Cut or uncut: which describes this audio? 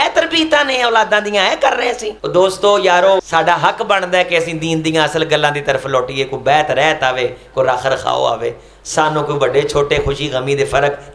cut